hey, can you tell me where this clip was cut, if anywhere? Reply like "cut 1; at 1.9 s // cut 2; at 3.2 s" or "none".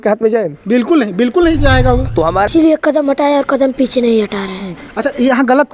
cut 1; at 2.5 s